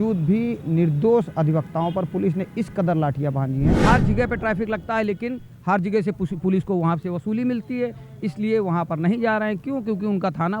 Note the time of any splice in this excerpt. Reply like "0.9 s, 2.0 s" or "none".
3.8 s